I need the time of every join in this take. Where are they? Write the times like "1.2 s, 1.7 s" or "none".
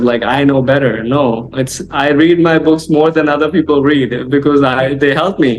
none